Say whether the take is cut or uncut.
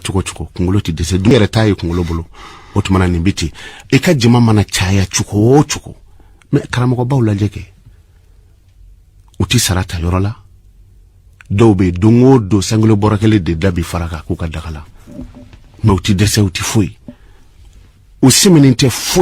cut